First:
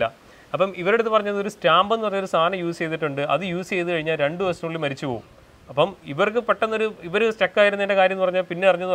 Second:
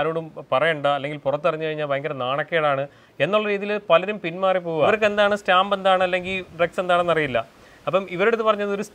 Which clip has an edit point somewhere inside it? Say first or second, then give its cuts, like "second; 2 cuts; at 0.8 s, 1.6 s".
second; 1 cut; at 4.9 s